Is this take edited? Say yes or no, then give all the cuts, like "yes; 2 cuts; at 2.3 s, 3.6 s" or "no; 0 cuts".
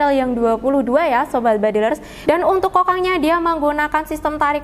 yes; 1 cut; at 2.1 s